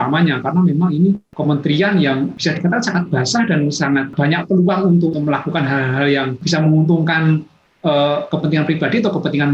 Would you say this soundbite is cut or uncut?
cut